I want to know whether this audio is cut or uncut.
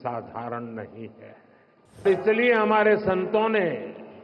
cut